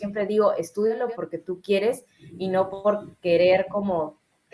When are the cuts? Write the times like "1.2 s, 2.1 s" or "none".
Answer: 1.0 s